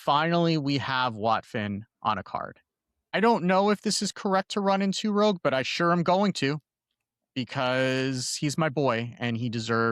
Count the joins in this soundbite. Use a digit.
1